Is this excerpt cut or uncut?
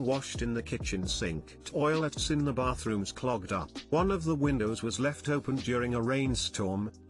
uncut